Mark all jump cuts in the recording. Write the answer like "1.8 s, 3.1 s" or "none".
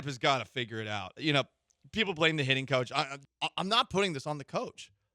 3.2 s

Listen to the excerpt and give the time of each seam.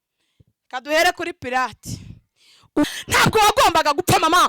2.9 s

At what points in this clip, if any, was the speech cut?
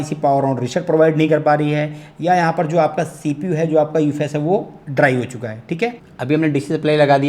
6.1 s

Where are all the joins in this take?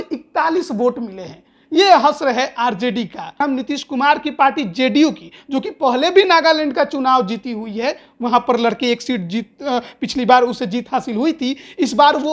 3.4 s

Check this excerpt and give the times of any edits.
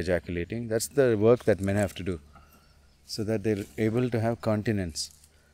none

